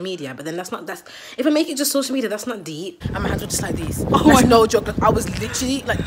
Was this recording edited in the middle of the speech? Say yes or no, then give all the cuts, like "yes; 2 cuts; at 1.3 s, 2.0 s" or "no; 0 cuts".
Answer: yes; 1 cut; at 3.0 s